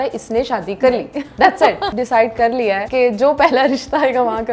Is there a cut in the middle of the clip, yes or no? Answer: yes